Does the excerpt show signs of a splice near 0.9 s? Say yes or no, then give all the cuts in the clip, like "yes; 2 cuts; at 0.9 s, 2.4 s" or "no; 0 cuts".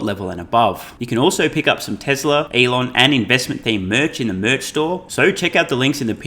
yes; 3 cuts; at 0.9 s, 2.5 s, 5.1 s